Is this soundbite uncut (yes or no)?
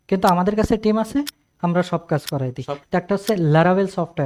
no